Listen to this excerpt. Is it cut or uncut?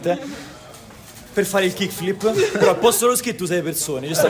uncut